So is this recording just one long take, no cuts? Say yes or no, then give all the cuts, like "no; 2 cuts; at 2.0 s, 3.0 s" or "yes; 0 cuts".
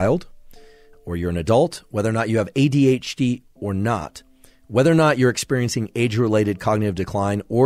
yes; 0 cuts